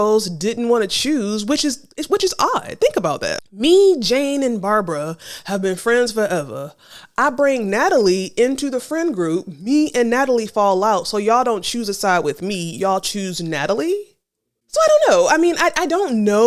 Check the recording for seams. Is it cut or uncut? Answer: uncut